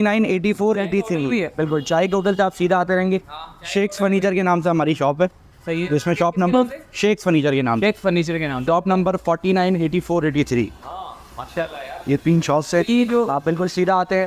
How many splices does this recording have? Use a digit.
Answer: 0